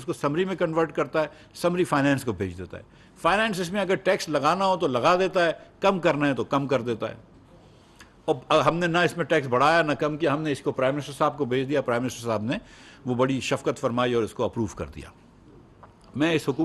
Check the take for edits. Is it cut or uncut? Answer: uncut